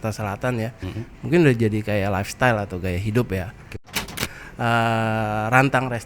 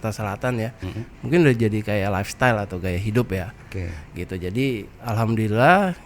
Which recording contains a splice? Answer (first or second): first